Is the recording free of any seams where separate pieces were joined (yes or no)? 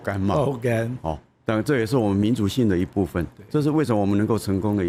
yes